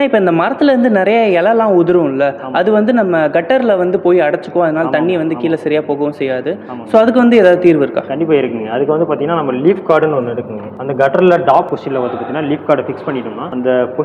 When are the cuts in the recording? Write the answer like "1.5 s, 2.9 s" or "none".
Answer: none